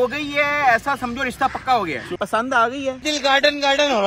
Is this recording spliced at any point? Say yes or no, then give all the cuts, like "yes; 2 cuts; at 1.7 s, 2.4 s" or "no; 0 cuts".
yes; 1 cut; at 2.2 s